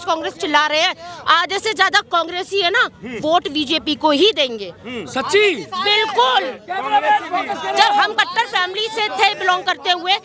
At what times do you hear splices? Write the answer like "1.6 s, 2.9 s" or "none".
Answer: none

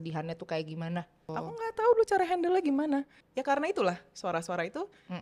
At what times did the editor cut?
1.3 s, 3.2 s

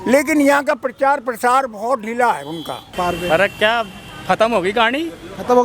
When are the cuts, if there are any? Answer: 3.0 s

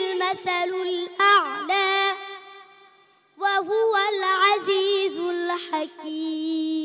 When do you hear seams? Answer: none

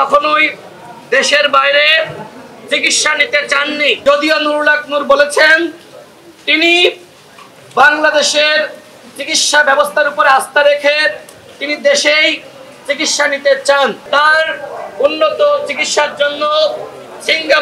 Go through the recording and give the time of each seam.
4.0 s, 14.0 s

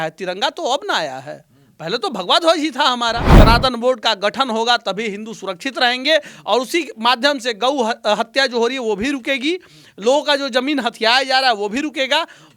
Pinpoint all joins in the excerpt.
3.3 s

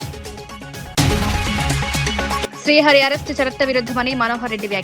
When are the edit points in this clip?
0.9 s, 2.4 s

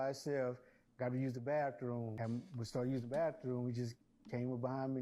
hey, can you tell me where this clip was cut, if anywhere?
2.1 s

